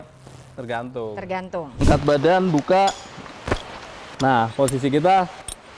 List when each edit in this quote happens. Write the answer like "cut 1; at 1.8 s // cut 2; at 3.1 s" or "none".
cut 1; at 1.7 s

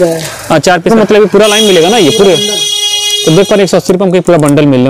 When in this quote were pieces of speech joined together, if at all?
cut 1; at 0.9 s

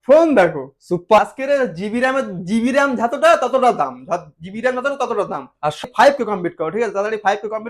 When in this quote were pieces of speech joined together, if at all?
cut 1; at 1.2 s // cut 2; at 5.8 s

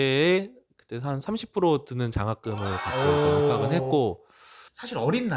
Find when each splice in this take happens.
cut 1; at 4.3 s

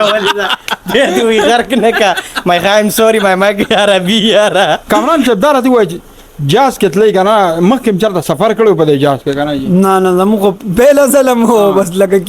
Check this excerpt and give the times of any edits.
cut 1; at 4.8 s

